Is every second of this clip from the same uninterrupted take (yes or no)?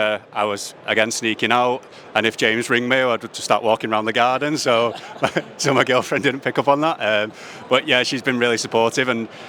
yes